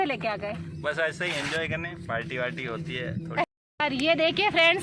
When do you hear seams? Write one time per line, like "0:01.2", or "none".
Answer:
0:03.5